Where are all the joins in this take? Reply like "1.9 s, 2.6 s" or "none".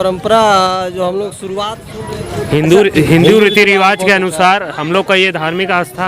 2.2 s